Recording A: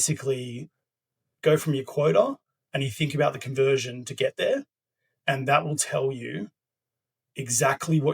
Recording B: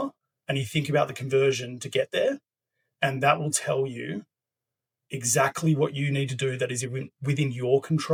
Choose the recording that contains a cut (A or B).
A